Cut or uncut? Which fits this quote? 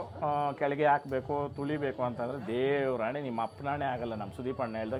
uncut